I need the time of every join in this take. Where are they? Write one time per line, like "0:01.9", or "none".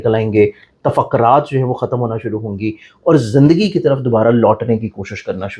none